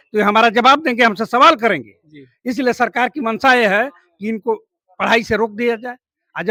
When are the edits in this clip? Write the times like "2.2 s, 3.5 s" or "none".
none